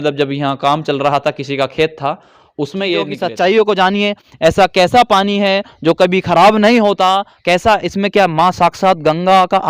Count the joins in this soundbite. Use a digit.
1